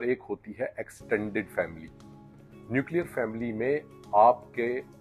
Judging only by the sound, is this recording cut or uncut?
uncut